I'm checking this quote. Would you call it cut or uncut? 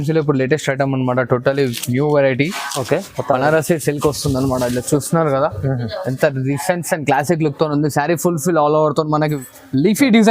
cut